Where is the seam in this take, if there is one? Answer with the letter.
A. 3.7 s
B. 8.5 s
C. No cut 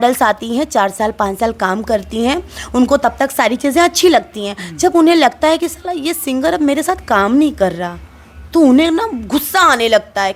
C